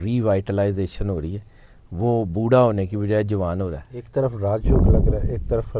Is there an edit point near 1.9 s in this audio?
no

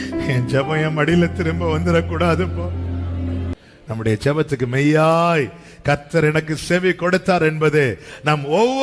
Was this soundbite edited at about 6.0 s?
no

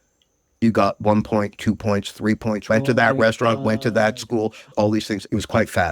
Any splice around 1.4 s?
no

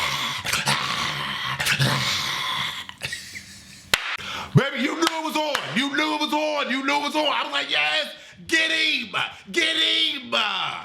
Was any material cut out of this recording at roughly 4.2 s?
yes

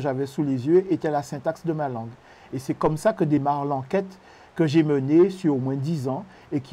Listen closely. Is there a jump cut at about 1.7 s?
no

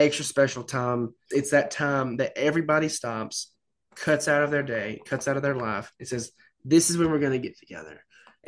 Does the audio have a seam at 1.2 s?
yes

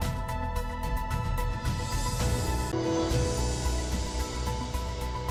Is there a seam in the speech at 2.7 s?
no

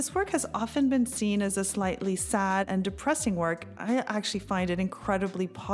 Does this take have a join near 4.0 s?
no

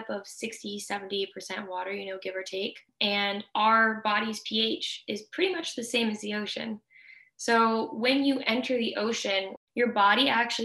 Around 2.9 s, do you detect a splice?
yes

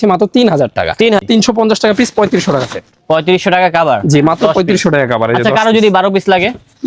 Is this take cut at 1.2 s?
yes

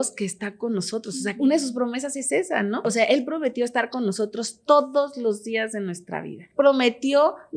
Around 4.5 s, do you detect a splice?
no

